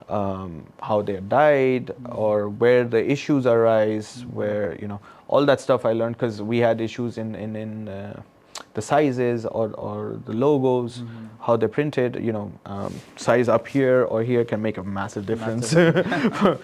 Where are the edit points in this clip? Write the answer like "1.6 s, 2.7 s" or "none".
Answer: none

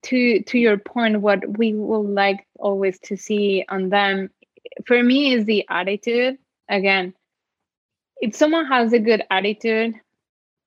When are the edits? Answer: none

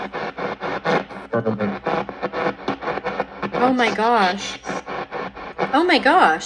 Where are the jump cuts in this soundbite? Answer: none

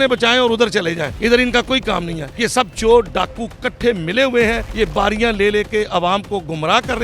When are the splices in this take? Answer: 2.2 s

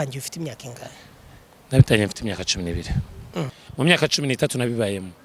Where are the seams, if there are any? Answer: 3.6 s

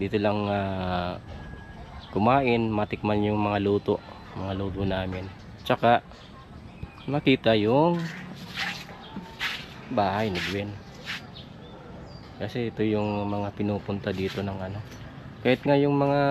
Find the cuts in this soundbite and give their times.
none

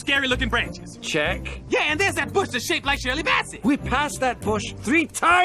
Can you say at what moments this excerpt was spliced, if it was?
1.2 s

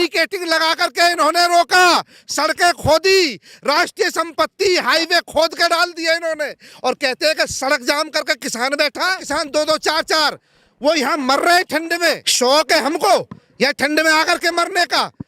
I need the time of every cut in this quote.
9.2 s, 12.3 s

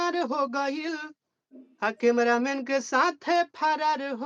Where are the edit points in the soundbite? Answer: none

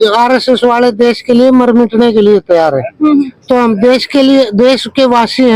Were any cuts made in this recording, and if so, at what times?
none

